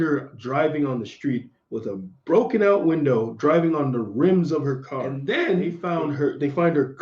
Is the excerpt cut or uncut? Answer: cut